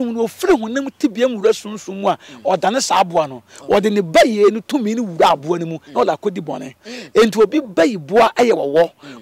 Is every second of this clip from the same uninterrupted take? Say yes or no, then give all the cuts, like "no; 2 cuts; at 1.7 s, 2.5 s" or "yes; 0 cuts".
yes; 0 cuts